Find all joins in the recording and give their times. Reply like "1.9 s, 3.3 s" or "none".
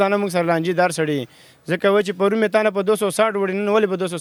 none